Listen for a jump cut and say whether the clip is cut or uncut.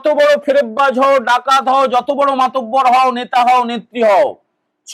uncut